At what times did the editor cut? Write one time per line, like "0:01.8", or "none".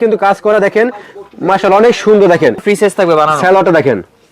0:02.6